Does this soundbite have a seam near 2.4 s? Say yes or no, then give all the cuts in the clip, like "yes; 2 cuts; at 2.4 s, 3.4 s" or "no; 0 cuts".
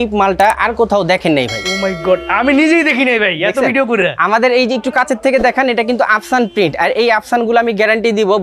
no; 0 cuts